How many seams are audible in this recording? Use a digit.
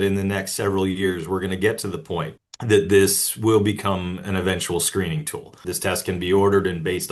2